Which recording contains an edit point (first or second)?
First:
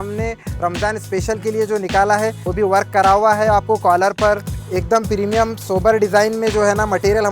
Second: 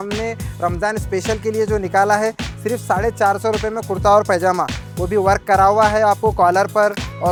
first